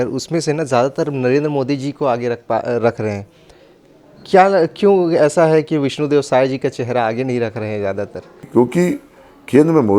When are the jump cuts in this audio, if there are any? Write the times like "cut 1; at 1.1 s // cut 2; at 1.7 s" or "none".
cut 1; at 8.5 s